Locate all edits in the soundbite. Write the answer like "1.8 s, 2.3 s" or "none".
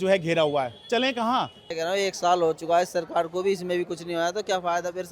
1.6 s